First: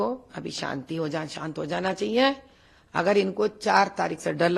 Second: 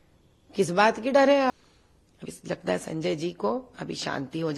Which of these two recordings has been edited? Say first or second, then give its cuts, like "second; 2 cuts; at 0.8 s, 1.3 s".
second; 1 cut; at 1.5 s